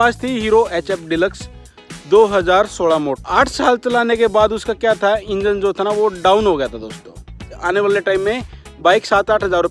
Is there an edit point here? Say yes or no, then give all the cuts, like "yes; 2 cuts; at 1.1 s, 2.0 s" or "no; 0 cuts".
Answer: yes; 2 cuts; at 3.2 s, 7.5 s